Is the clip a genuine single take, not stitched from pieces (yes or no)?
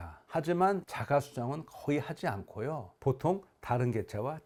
yes